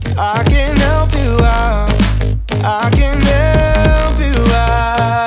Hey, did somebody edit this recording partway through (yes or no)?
no